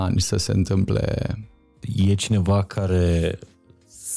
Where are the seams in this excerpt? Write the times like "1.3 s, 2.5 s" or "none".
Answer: 1.8 s